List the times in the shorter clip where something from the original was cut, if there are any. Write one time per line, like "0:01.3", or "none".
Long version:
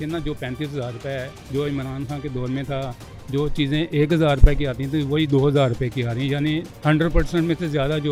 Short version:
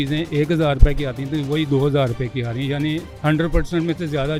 none

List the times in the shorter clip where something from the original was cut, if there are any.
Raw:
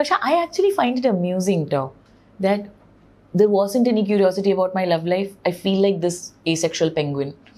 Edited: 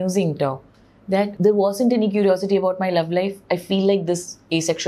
0:01.3

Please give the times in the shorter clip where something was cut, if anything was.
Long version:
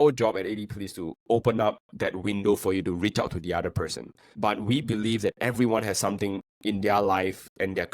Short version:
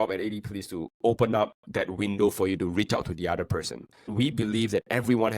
0:04.1

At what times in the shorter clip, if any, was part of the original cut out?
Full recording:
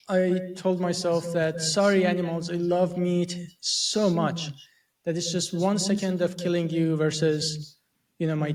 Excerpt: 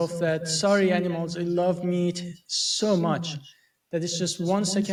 none

